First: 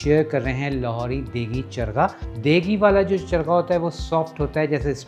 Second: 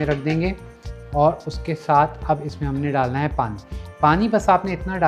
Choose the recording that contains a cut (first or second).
first